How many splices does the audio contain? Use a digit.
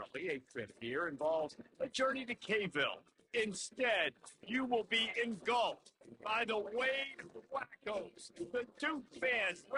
0